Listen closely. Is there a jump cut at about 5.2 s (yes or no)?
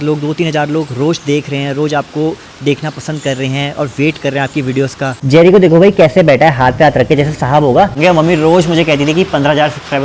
yes